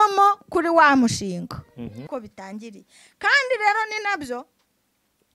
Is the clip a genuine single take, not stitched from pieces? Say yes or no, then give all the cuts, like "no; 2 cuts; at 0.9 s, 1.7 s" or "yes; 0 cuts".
no; 1 cut; at 2.0 s